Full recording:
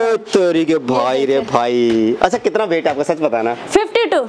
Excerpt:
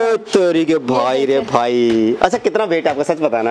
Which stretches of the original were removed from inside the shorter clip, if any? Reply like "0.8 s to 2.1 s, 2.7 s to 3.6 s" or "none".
none